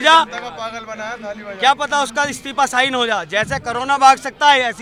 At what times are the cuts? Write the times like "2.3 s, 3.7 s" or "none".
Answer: none